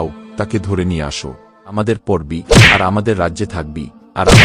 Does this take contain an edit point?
yes; 1 cut; at 1.7 s

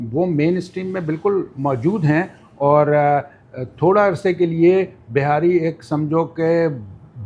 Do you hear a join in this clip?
no; 0 cuts

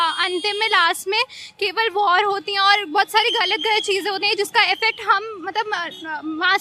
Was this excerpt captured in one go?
yes; 0 cuts

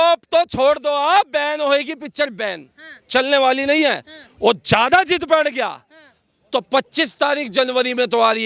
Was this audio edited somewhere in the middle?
no; 0 cuts

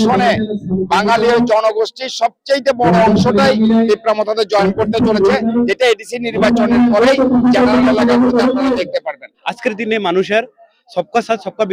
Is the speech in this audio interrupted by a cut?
yes; 1 cut; at 9.2 s

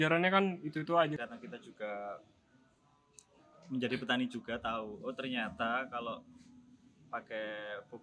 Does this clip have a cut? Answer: yes; 1 cut; at 1.2 s

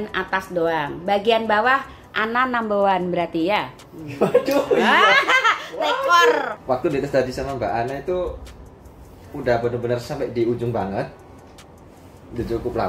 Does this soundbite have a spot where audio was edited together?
yes; 1 cut; at 6.5 s

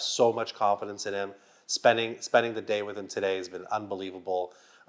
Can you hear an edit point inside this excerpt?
no; 0 cuts

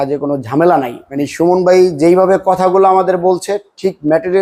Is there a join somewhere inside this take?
yes; 1 cut; at 1.0 s

